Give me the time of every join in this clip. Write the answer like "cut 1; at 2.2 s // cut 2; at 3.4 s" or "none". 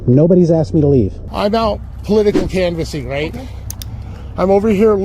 cut 1; at 1.2 s